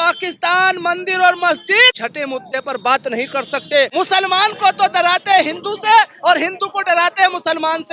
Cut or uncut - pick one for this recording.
cut